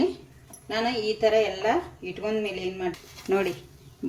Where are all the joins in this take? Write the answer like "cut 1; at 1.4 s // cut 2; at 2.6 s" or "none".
cut 1; at 3.0 s